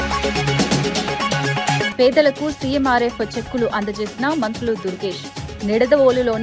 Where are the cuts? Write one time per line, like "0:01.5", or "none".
0:01.9